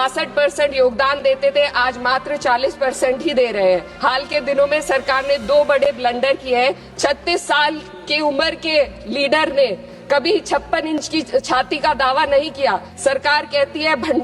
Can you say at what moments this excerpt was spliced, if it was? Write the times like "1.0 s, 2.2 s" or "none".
3.9 s, 6.9 s, 12.9 s